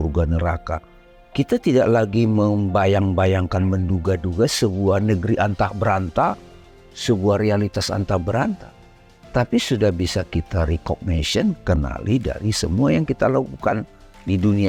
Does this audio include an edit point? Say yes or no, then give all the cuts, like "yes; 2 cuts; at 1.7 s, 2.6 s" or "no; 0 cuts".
no; 0 cuts